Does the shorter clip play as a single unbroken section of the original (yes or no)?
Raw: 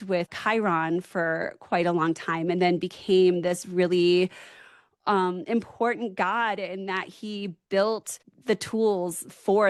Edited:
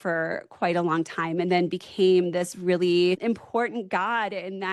no